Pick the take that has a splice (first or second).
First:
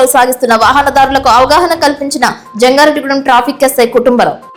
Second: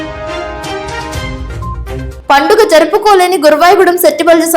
second